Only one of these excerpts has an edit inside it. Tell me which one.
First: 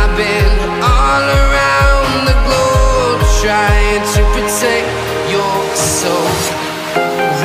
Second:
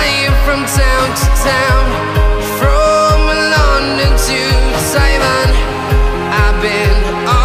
second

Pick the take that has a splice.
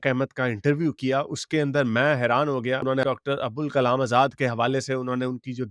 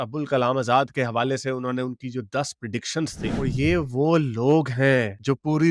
second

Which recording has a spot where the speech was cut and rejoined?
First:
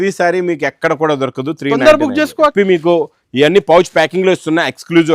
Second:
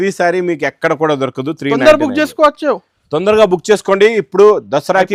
first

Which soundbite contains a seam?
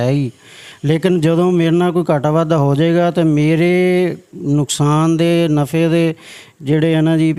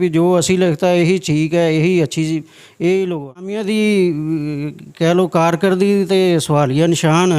second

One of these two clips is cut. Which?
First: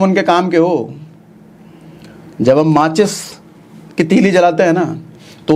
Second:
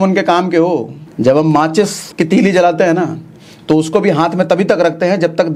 second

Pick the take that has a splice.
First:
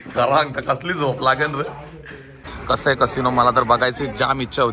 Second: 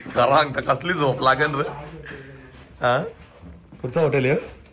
first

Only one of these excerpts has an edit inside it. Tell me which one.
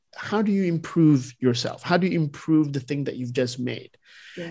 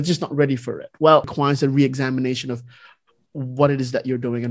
second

